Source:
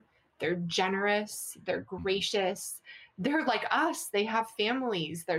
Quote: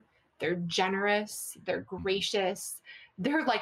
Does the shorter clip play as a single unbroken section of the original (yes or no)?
yes